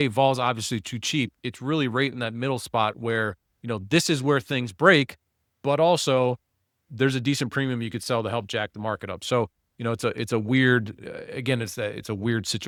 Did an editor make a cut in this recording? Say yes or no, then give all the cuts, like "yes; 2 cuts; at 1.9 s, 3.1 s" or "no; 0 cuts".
no; 0 cuts